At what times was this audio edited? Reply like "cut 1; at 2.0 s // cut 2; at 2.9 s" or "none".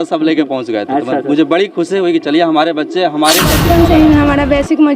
cut 1; at 3.5 s